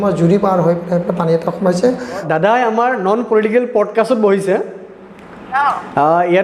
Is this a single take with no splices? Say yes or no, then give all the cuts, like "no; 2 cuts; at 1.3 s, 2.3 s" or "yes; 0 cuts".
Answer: no; 1 cut; at 2.2 s